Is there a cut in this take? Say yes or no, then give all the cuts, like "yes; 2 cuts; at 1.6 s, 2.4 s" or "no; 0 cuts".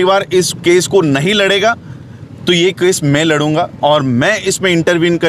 no; 0 cuts